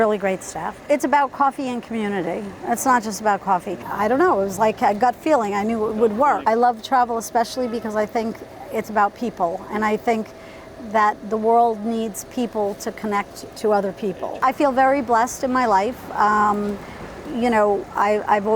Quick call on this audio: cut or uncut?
cut